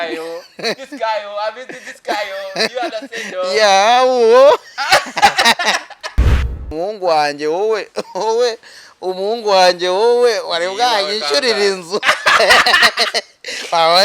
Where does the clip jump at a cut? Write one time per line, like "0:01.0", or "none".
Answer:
0:06.2